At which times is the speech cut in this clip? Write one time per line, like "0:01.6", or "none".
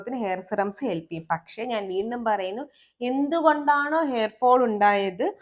none